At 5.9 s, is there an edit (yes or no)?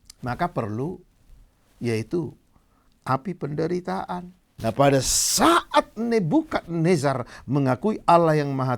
no